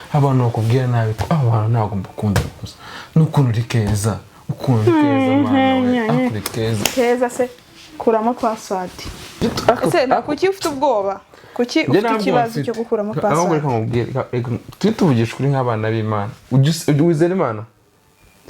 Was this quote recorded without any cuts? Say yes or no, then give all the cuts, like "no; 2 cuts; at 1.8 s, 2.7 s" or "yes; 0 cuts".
no; 1 cut; at 9.4 s